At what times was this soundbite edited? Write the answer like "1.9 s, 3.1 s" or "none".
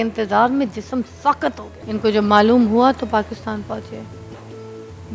1.7 s